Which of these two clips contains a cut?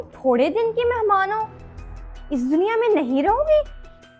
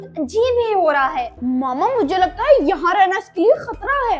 second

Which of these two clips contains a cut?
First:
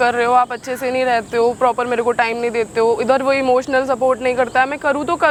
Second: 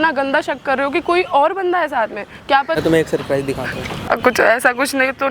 second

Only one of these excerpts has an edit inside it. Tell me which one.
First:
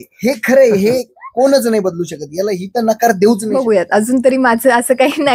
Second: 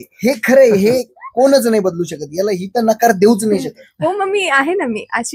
first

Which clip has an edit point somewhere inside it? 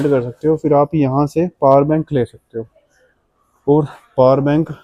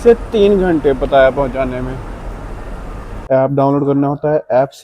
second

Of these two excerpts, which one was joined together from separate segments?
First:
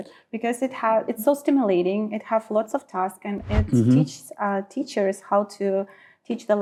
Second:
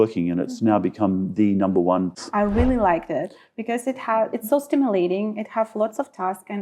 second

